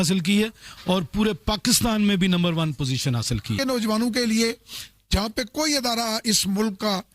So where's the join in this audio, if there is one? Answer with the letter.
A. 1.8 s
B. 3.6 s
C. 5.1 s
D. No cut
B